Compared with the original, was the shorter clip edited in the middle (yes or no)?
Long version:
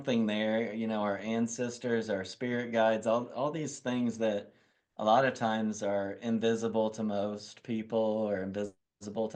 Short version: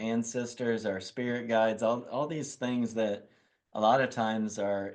no